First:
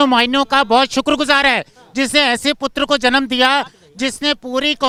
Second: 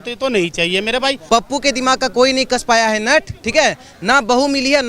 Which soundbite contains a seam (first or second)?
second